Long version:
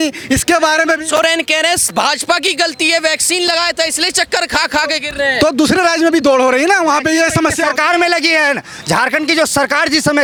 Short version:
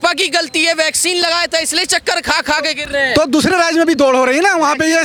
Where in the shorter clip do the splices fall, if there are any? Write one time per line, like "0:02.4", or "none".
none